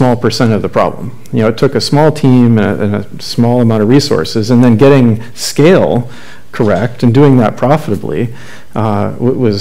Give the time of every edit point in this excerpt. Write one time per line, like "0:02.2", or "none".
none